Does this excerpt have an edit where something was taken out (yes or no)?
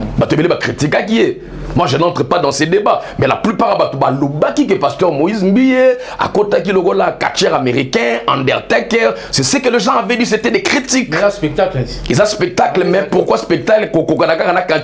no